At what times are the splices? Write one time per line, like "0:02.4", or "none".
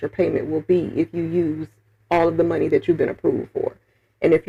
none